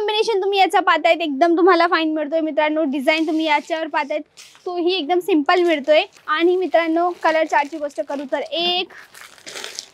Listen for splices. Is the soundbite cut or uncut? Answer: cut